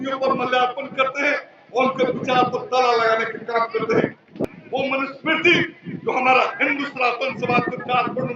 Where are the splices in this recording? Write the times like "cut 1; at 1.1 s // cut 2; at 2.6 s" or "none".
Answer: cut 1; at 4.5 s